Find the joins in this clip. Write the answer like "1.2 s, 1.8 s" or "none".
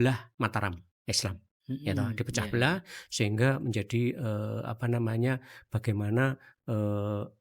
none